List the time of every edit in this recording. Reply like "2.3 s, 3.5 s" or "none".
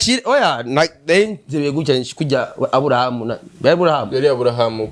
none